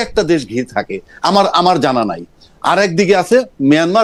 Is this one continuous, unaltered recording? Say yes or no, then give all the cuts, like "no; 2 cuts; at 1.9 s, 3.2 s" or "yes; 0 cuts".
yes; 0 cuts